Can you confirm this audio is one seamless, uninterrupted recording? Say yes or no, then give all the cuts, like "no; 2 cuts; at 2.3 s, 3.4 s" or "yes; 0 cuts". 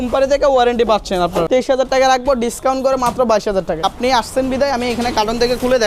no; 2 cuts; at 1.5 s, 3.8 s